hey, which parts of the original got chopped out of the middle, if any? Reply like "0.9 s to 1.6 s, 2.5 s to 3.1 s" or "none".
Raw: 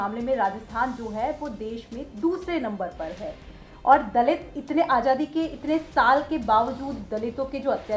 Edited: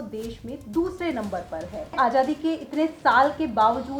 3.4 s to 4.9 s